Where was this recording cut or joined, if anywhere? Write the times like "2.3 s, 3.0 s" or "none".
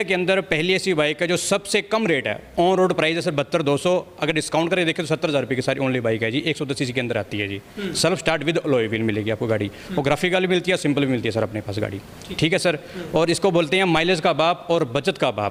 none

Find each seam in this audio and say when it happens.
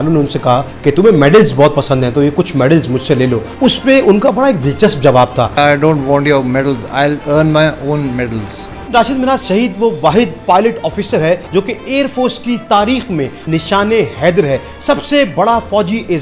3.5 s, 5.6 s, 8.9 s

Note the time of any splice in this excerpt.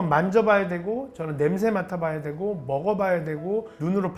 none

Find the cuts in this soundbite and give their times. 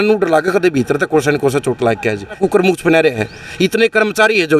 2.4 s

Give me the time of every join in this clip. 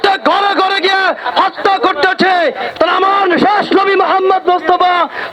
2.6 s

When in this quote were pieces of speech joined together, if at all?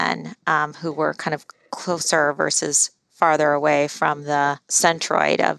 4.7 s

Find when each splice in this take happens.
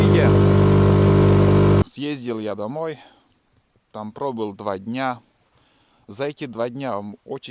1.8 s

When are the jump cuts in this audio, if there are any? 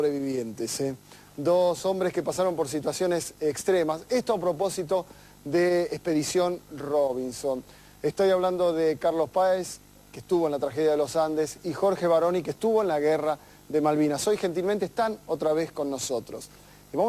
13.8 s

